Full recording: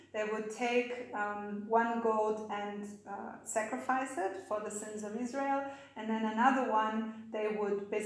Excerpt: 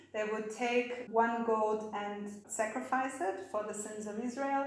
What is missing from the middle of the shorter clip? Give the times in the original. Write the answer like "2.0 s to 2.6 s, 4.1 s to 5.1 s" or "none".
1.0 s to 1.6 s, 3.0 s to 3.4 s